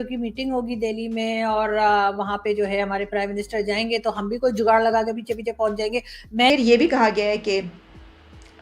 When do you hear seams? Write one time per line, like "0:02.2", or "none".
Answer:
0:06.5